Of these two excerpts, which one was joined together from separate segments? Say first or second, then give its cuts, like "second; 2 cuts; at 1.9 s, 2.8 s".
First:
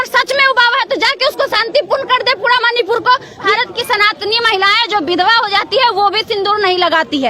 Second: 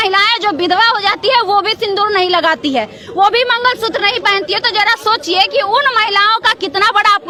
first; 1 cut; at 3.5 s